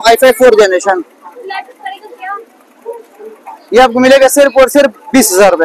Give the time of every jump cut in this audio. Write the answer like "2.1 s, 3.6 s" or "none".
none